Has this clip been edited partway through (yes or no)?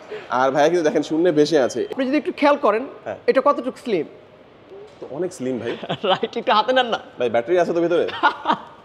yes